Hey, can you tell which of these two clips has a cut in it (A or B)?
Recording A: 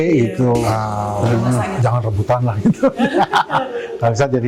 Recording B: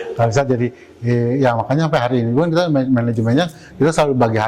A